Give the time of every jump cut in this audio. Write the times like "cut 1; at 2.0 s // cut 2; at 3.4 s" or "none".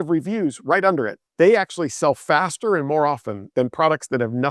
cut 1; at 1.2 s